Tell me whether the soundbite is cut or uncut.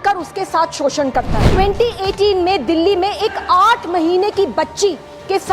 cut